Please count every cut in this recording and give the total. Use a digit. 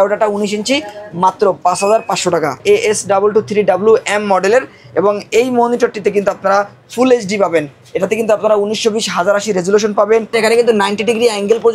2